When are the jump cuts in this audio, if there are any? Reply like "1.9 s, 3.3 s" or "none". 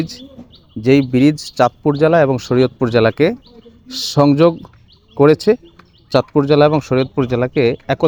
none